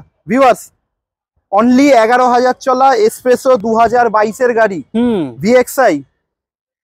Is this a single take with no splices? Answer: yes; 0 cuts

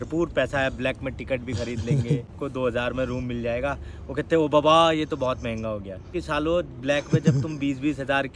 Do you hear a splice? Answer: yes; 2 cuts; at 2.4 s, 6.1 s

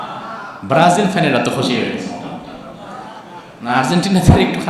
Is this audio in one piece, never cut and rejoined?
yes; 0 cuts

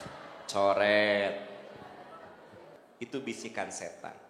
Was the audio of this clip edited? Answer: yes; 1 cut; at 2.8 s

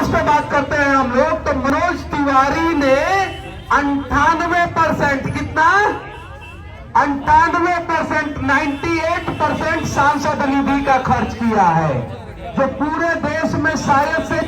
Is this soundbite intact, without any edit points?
no; 1 cut; at 1.7 s

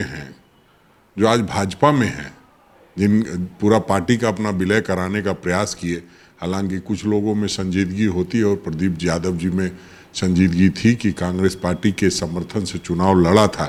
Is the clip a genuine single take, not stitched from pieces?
yes; 0 cuts

